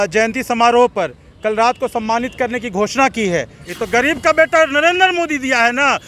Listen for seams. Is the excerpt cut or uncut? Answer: cut